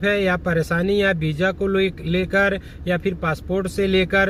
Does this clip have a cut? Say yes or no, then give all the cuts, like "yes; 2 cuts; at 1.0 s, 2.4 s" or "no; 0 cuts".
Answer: no; 0 cuts